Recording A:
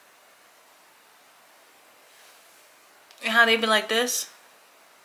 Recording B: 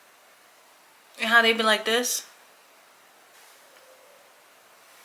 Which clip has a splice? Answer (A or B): B